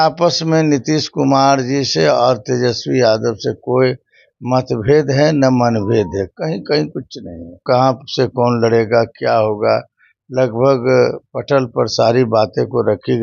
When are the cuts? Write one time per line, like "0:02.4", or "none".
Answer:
0:07.6